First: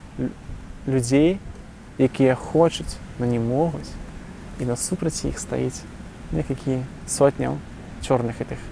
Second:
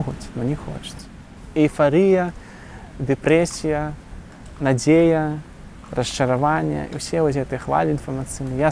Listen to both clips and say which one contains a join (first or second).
second